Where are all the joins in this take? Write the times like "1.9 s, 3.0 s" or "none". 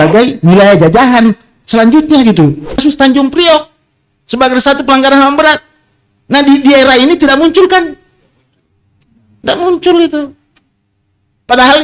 2.8 s